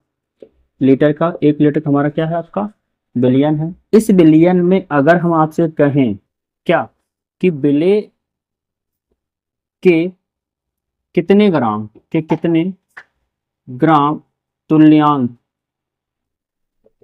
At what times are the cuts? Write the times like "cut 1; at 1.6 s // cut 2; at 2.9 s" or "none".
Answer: none